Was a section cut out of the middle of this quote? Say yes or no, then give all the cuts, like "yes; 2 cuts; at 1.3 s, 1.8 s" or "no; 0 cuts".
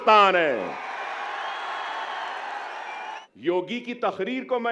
yes; 1 cut; at 3.2 s